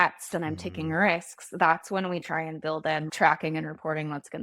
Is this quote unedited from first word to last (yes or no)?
no